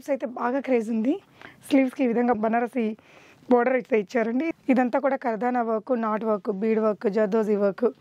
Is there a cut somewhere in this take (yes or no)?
yes